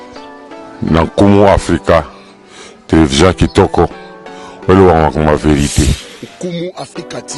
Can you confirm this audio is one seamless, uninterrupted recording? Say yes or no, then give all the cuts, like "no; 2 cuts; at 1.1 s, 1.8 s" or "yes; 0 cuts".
yes; 0 cuts